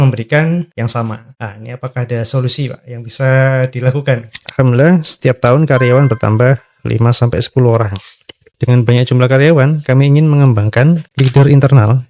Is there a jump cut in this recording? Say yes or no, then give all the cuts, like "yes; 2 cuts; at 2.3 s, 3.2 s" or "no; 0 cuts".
yes; 2 cuts; at 4.3 s, 11.1 s